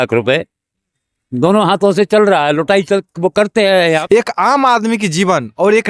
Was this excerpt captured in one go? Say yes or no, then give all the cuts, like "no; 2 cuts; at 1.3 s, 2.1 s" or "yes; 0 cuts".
no; 1 cut; at 4.0 s